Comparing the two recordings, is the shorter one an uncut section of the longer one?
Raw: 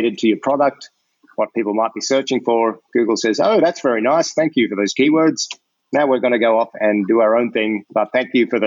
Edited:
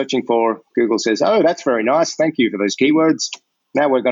yes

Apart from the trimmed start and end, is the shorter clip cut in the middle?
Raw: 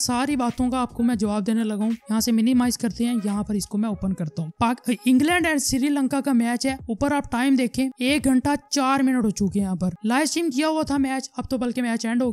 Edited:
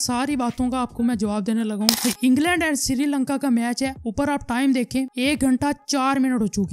yes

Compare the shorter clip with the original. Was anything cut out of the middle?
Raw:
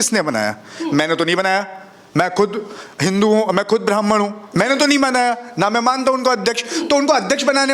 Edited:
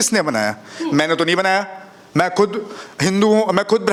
no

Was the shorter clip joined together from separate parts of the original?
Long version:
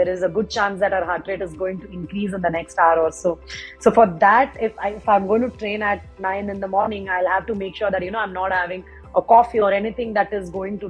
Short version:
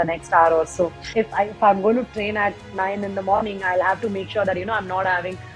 yes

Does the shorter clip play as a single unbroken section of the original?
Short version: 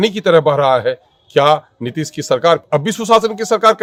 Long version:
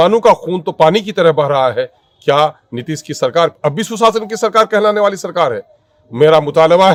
yes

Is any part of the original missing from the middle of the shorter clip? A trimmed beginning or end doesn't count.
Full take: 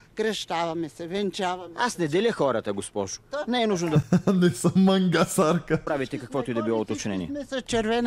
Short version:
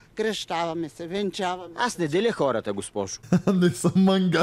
yes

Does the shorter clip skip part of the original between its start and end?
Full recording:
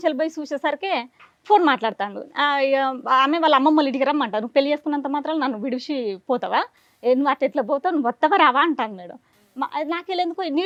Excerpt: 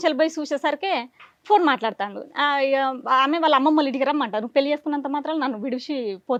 no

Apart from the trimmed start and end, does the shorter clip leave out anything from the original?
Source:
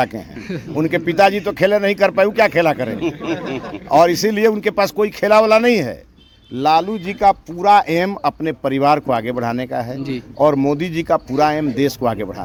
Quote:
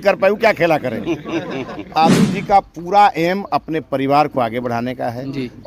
yes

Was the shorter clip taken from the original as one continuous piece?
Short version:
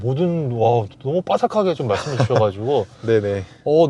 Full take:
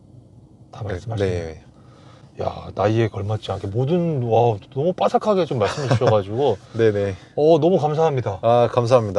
yes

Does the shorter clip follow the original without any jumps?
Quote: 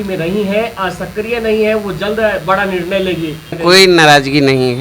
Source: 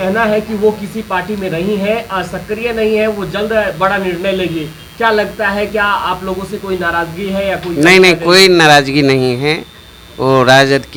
no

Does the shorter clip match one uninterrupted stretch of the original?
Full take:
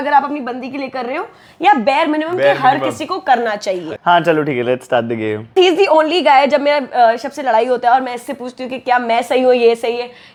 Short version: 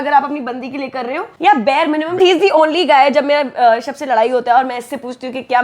no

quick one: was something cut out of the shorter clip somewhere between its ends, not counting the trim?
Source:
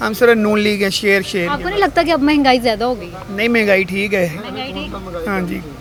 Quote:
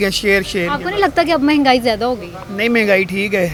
no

